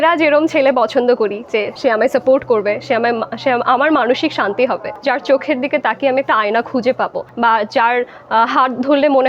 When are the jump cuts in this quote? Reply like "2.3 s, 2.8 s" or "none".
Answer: 1.7 s, 4.9 s, 7.2 s